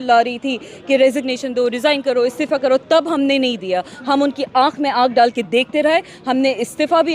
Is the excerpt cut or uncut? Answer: uncut